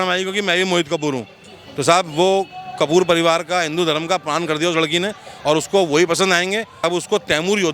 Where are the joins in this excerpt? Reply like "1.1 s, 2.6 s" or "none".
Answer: none